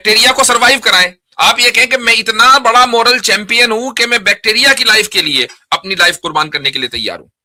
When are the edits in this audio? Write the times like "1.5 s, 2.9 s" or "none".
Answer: none